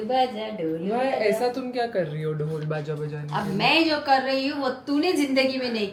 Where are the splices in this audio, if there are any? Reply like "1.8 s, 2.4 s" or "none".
none